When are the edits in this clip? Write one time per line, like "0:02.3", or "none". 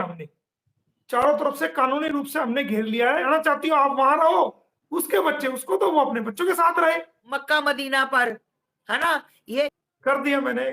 0:03.2
0:07.5
0:09.7